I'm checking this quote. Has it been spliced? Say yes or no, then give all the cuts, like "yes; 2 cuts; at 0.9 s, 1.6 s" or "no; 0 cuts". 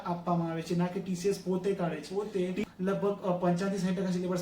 yes; 1 cut; at 2.1 s